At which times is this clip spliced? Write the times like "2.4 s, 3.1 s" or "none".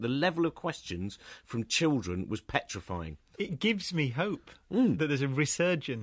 3.2 s